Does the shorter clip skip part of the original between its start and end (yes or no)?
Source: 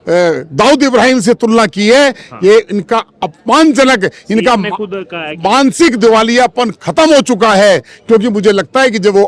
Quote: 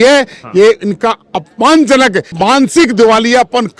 yes